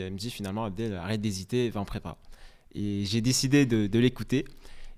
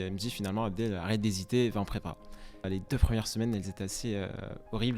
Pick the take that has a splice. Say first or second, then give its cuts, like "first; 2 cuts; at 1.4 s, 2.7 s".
second; 1 cut; at 2.7 s